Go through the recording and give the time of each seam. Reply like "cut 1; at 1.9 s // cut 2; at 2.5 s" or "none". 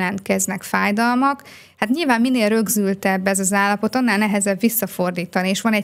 none